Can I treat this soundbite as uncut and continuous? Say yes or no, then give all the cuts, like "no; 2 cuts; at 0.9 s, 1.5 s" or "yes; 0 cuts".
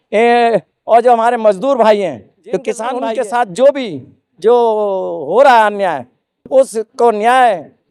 no; 1 cut; at 2.9 s